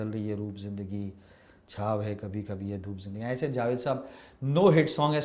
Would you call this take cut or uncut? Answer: uncut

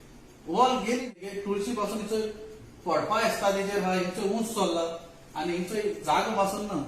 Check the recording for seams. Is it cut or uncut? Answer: cut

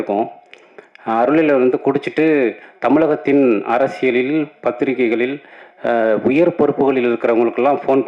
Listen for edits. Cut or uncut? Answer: uncut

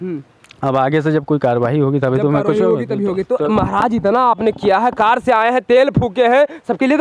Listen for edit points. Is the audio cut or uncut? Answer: uncut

